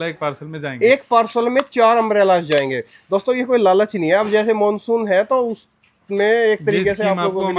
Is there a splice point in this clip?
no; 0 cuts

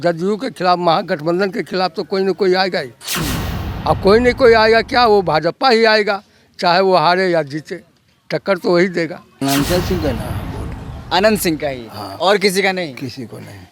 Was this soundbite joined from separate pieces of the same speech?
yes; 1 cut; at 9.3 s

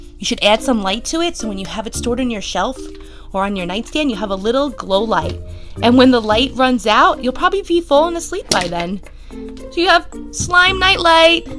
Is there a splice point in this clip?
no; 0 cuts

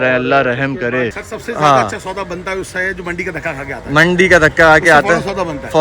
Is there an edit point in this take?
yes; 1 cut; at 1.1 s

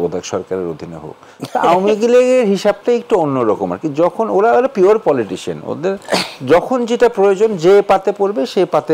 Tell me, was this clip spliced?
no; 0 cuts

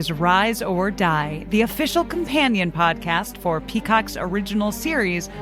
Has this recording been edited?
no; 0 cuts

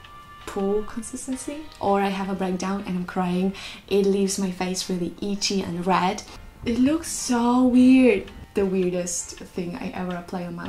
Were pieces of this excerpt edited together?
yes; 2 cuts; at 1.8 s, 6.3 s

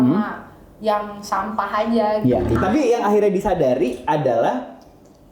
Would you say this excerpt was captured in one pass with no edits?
no; 1 cut; at 2.6 s

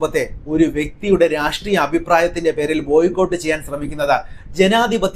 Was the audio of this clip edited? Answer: no; 0 cuts

